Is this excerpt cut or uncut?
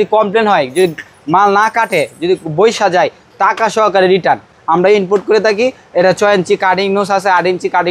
uncut